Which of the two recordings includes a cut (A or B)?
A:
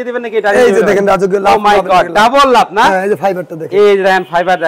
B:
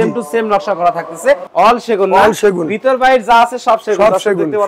B